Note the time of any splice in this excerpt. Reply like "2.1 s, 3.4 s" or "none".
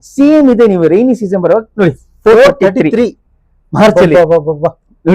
none